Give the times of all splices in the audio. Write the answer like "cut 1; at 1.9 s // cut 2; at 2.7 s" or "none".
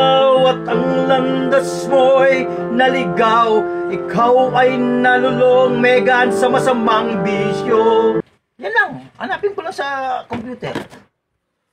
cut 1; at 8.2 s